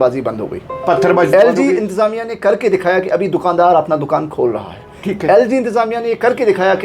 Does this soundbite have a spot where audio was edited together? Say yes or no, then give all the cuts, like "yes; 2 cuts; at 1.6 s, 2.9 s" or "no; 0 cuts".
no; 0 cuts